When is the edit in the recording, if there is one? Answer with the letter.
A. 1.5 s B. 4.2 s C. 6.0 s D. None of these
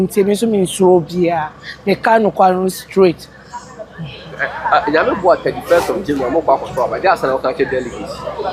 D